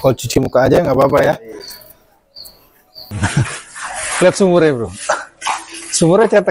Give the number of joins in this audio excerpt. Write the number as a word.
one